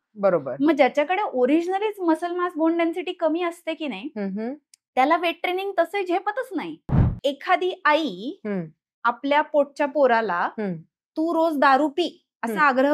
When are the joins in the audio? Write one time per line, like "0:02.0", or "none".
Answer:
0:07.0